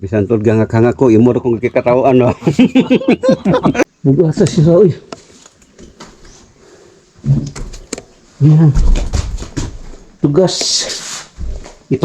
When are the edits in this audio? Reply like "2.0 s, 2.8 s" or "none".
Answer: 3.8 s

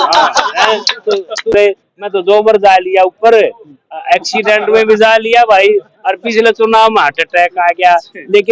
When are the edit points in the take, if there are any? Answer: 1.5 s

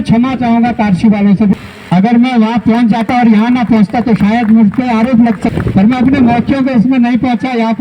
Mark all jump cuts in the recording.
1.6 s, 5.5 s

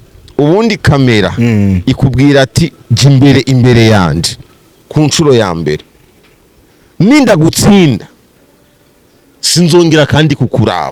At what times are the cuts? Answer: none

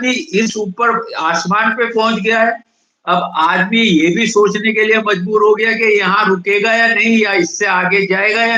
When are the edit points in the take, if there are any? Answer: none

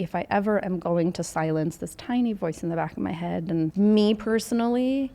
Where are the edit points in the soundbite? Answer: 3.7 s

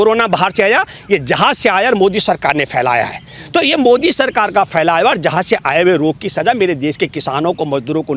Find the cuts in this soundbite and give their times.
none

